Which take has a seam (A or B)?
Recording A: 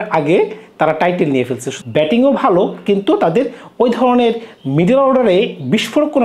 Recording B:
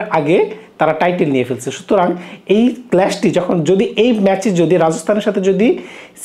A